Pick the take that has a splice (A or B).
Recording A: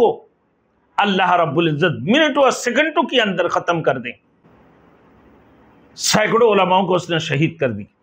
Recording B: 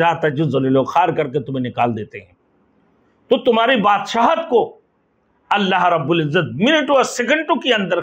A